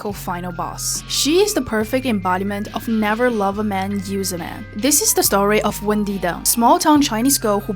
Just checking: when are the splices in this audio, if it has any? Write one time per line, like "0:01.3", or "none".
0:05.5